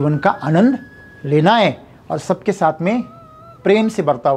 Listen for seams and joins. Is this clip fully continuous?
yes; 0 cuts

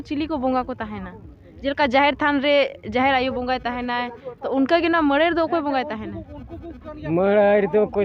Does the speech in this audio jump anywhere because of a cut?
no; 0 cuts

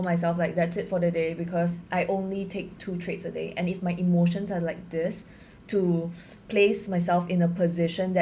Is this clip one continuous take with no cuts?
yes; 0 cuts

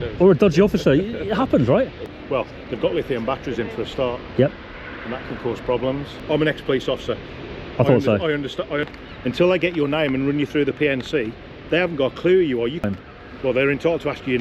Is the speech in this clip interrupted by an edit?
yes; 4 cuts; at 2.1 s, 6.1 s, 8.9 s, 12.9 s

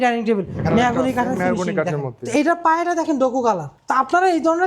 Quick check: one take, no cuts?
no; 2 cuts; at 2.2 s, 3.7 s

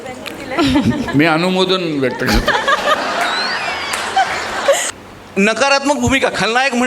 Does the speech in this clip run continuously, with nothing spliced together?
no; 1 cut; at 4.8 s

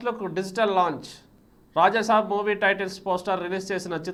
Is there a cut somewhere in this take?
no; 0 cuts

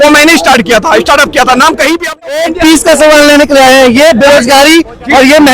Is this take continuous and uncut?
no; 1 cut; at 2.4 s

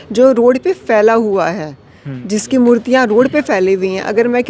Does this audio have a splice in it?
no; 0 cuts

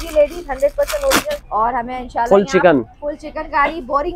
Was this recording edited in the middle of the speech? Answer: yes; 1 cut; at 1.3 s

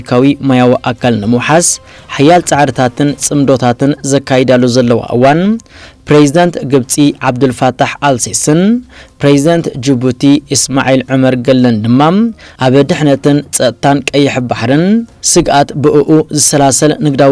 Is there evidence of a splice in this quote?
no; 0 cuts

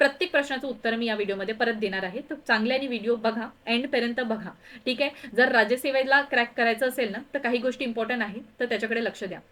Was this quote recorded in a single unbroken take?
yes; 0 cuts

